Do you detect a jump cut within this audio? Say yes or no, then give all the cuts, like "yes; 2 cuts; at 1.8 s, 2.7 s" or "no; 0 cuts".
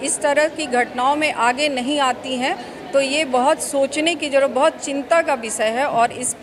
no; 0 cuts